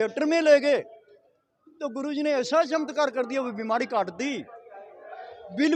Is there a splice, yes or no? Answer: no